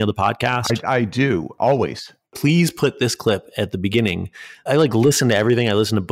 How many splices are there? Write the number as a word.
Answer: one